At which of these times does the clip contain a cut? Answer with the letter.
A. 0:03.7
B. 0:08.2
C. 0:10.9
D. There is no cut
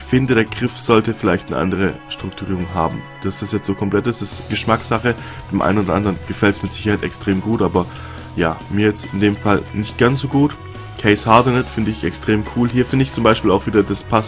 C